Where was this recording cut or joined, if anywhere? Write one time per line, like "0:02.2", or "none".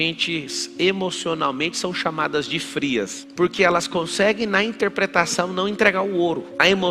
0:03.2

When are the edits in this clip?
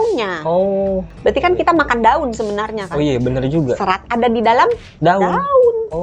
0:01.1

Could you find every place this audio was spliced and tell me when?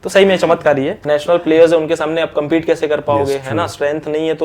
0:01.0

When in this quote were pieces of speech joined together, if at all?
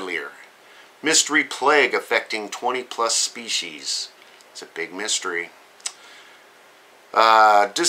0:02.0

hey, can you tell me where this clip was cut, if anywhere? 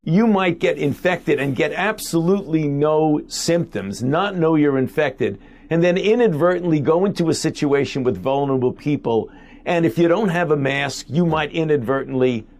none

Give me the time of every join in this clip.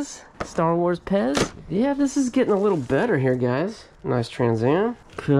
none

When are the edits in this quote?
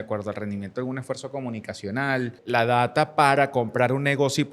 0:02.4

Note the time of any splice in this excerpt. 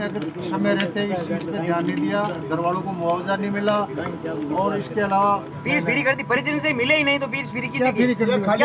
0:05.5

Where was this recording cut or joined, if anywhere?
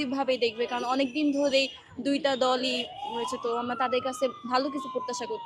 none

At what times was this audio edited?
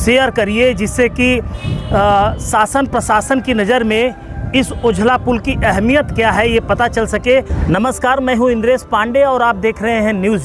0:07.6

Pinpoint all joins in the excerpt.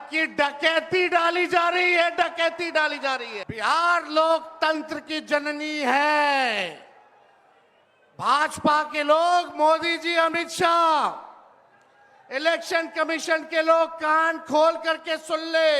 0:03.4

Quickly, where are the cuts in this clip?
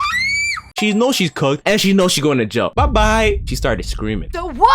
0:03.4

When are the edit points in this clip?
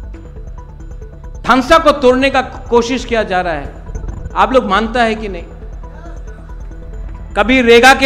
0:01.4

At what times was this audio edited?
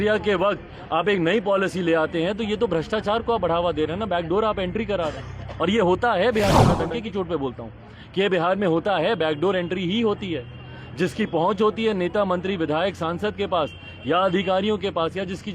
0:06.8

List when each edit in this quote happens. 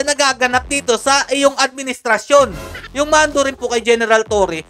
0:02.8

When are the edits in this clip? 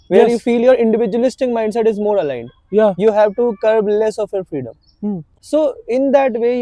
0:05.3

